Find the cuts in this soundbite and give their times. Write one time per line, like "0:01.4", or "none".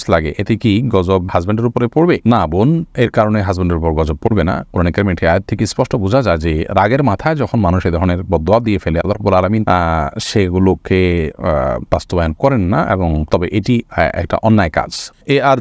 none

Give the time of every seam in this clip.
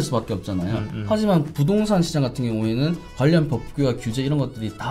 none

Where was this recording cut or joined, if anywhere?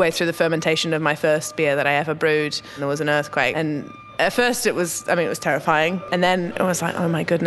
0:02.8
0:06.0

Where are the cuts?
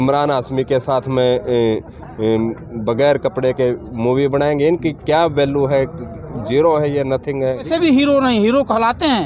0:07.7

